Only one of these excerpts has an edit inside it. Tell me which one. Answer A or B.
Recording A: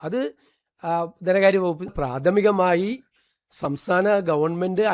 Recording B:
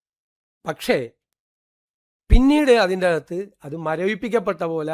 A